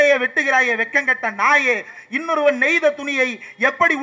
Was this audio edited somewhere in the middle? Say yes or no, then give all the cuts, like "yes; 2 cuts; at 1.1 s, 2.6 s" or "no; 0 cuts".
no; 0 cuts